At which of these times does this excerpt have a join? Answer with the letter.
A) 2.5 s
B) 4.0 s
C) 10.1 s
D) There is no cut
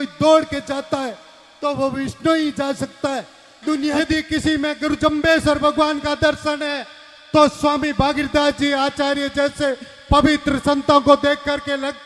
B